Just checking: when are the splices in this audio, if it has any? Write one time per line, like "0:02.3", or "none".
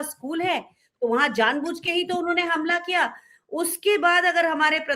none